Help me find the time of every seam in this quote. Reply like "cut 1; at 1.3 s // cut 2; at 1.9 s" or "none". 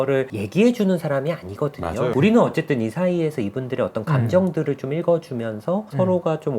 cut 1; at 2.1 s